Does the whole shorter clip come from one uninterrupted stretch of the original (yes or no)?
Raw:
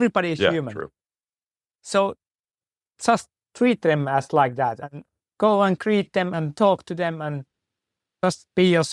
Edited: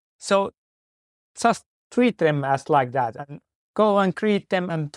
yes